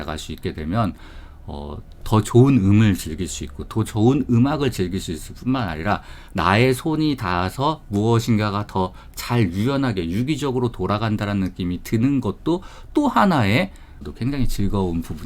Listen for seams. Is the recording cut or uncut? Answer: cut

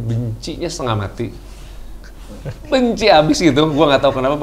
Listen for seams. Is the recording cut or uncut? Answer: uncut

